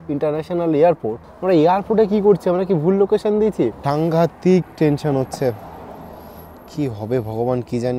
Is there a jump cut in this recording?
yes; 2 cuts; at 1.3 s, 3.8 s

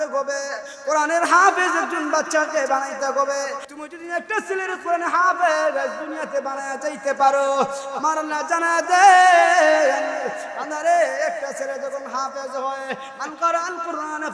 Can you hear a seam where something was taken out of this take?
yes; 1 cut; at 3.6 s

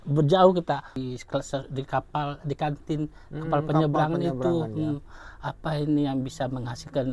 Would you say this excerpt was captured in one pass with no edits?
no; 1 cut; at 1.0 s

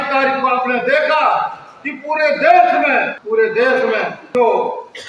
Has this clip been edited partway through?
yes; 2 cuts; at 3.2 s, 4.2 s

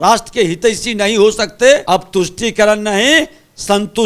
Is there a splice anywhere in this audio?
yes; 1 cut; at 1.8 s

